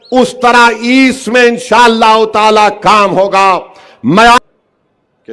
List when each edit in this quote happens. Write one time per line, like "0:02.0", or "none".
0:04.4